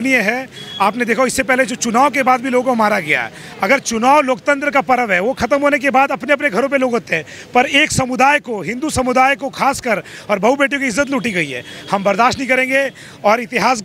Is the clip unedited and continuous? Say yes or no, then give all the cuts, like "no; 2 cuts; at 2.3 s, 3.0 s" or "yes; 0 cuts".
yes; 0 cuts